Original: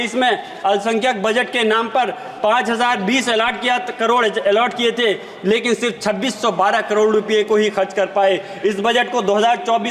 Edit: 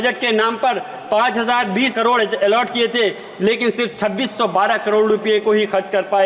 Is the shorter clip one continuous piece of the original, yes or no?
no